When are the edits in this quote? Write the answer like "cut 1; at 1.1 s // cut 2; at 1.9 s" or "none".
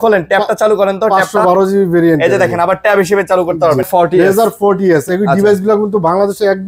cut 1; at 3.9 s

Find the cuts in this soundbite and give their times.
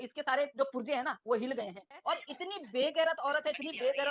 cut 1; at 2.0 s

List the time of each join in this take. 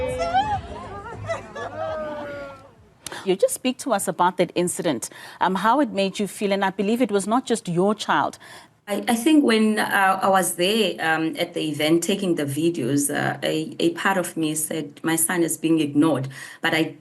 cut 1; at 8.6 s

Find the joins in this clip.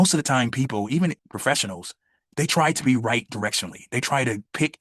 cut 1; at 1.2 s

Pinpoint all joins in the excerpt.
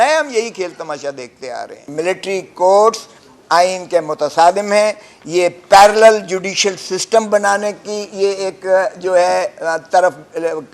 cut 1; at 1.8 s

